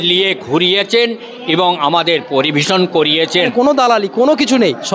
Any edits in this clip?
yes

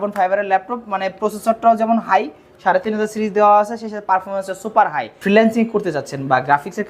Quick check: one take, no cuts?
no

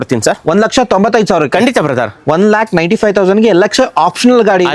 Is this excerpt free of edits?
yes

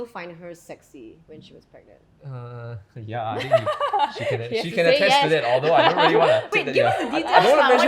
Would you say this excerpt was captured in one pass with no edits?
no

